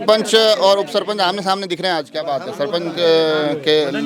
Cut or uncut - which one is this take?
uncut